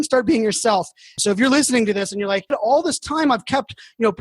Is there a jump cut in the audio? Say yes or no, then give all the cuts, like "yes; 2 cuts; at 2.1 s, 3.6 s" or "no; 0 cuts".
yes; 1 cut; at 1.1 s